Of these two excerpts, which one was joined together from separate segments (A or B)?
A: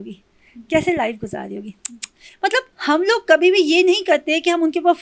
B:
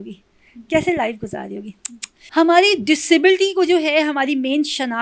B